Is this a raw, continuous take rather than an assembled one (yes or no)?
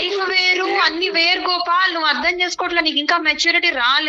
yes